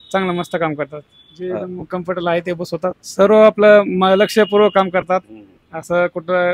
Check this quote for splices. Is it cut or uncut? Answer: cut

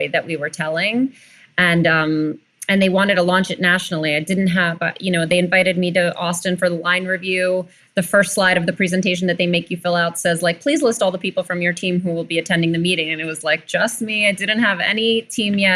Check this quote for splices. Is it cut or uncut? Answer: uncut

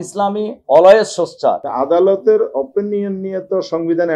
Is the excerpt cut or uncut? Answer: cut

